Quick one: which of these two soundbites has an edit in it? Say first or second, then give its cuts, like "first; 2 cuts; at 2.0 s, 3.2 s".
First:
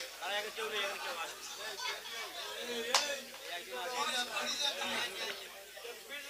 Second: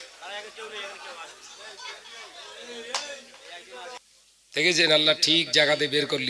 second; 1 cut; at 4.0 s